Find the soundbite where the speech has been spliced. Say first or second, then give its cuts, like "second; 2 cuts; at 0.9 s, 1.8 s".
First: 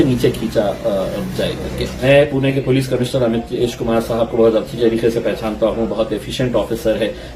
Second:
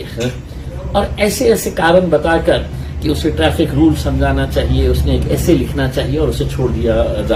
first; 1 cut; at 1.9 s